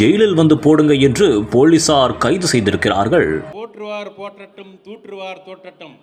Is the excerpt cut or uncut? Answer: cut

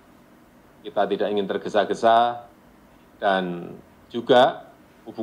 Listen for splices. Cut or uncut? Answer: uncut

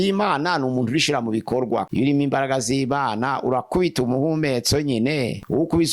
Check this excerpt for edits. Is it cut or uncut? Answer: cut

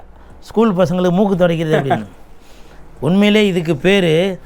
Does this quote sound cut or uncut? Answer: uncut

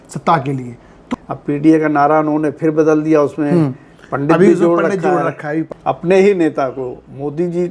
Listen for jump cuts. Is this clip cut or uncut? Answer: cut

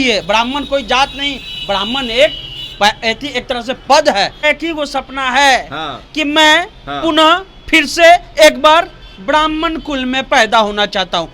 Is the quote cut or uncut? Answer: cut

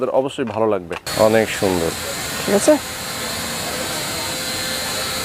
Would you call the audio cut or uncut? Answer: cut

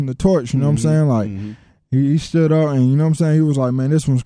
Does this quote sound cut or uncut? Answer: uncut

